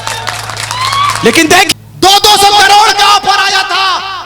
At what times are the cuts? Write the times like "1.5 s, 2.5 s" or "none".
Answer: 1.7 s

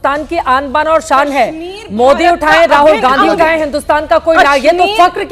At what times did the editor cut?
none

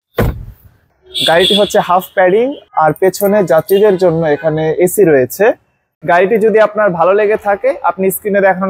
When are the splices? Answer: 0.9 s, 5.9 s

